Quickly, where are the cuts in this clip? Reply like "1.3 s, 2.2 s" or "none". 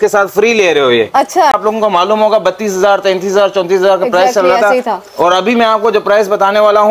1.6 s